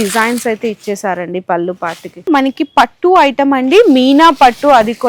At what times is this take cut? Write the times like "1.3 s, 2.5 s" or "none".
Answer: 2.2 s